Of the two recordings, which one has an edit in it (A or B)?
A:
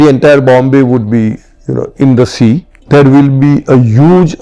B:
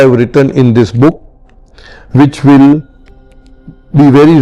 A